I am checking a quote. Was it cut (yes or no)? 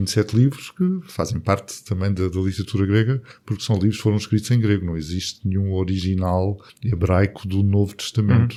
no